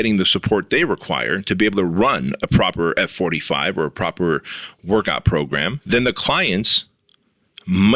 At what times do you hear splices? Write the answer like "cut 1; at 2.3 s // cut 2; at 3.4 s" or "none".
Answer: cut 1; at 5.8 s